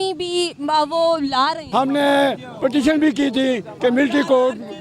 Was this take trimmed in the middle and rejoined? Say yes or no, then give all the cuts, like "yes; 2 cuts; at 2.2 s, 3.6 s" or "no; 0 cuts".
yes; 1 cut; at 1.6 s